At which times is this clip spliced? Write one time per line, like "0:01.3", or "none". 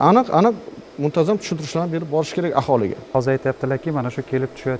none